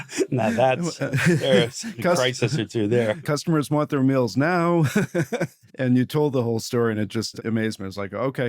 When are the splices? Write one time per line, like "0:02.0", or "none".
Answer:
0:03.2
0:05.7
0:07.4